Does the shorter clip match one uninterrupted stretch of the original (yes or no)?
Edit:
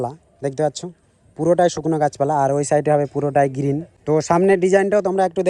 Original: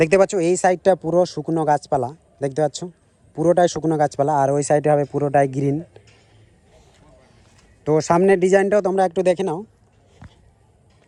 no